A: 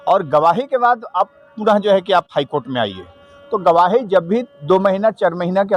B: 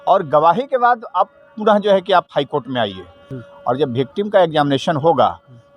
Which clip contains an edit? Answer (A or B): B